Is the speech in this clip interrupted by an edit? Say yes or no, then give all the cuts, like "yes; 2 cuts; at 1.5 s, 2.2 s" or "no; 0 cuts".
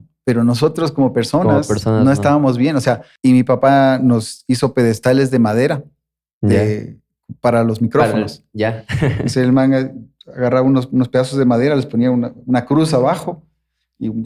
yes; 1 cut; at 3.1 s